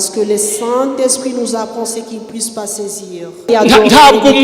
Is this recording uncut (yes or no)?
no